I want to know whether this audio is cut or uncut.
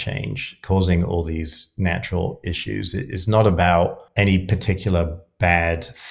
cut